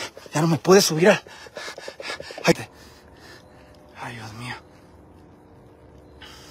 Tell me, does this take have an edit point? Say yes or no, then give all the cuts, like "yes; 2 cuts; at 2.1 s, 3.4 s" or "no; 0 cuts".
yes; 1 cut; at 2.5 s